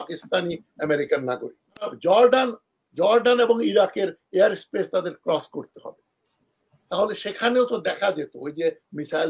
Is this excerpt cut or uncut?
cut